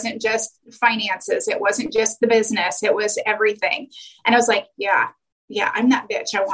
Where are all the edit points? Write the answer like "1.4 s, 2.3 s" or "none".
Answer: none